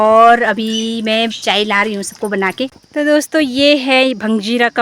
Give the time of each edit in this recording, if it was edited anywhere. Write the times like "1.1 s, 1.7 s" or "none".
2.8 s